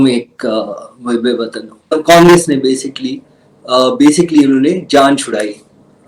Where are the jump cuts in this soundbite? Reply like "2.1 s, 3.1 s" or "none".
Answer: 1.9 s